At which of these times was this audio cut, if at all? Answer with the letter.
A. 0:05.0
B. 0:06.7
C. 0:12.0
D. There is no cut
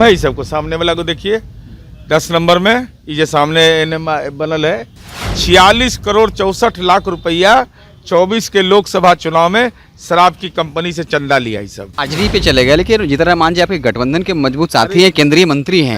C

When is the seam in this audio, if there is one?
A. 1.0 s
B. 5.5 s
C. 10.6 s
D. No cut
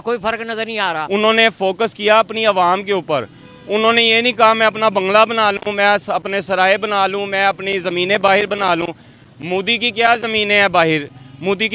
A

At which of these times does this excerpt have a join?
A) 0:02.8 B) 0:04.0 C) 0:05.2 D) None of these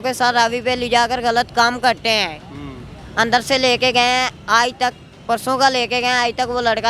D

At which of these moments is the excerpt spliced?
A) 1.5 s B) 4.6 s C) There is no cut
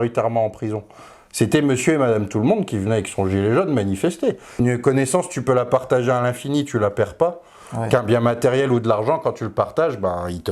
B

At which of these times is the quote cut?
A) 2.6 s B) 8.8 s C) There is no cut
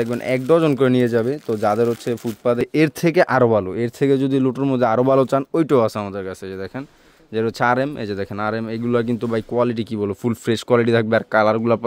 A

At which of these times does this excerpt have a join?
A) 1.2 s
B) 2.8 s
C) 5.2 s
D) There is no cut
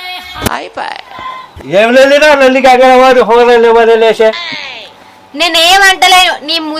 A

